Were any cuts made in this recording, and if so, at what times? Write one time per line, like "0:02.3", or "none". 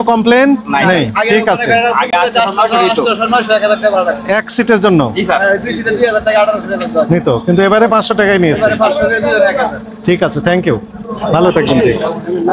none